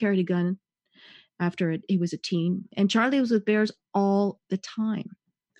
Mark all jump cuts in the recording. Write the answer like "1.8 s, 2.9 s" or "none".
2.7 s